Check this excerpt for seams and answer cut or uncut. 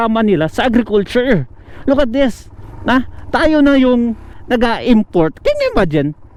uncut